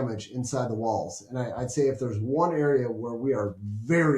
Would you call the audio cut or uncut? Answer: uncut